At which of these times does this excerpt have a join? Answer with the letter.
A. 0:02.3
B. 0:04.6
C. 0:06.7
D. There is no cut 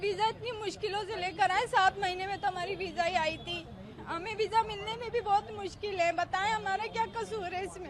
D